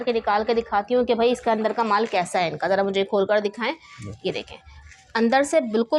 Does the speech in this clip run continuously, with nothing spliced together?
yes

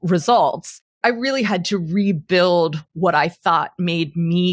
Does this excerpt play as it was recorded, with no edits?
no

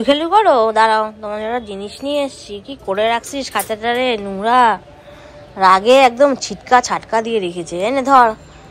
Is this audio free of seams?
yes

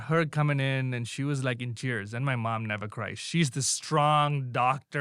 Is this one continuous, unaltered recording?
yes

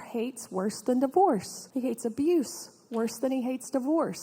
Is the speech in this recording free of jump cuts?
no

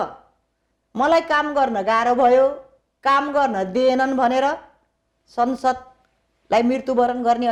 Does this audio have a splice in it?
no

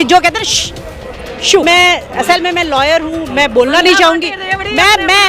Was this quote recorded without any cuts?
no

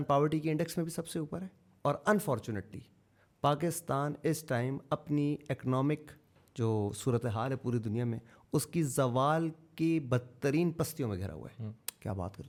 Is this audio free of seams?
yes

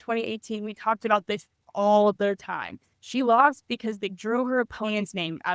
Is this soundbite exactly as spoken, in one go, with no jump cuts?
yes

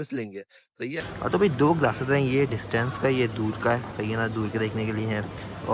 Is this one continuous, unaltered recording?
no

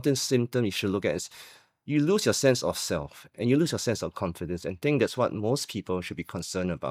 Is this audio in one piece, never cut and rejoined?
yes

